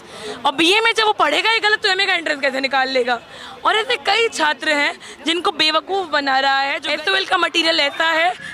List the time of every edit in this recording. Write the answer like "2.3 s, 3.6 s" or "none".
6.8 s